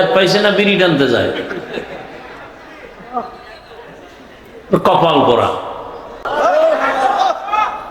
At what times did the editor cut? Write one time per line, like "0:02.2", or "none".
0:06.2